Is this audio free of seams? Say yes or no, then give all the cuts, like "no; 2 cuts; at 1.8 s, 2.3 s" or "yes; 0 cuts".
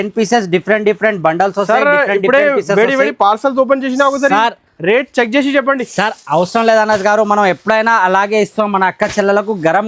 yes; 0 cuts